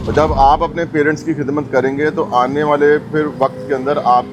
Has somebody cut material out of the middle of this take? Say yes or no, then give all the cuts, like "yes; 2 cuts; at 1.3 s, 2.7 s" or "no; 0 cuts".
no; 0 cuts